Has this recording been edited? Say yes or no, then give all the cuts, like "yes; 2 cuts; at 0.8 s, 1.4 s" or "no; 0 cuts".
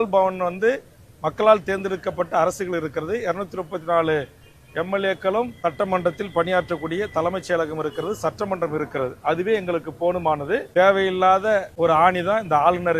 yes; 3 cuts; at 5.5 s, 10.7 s, 11.7 s